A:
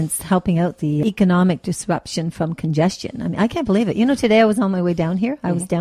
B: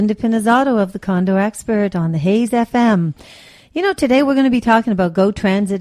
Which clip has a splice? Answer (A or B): A